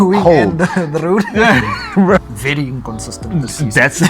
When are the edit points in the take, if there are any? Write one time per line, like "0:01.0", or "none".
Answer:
0:02.3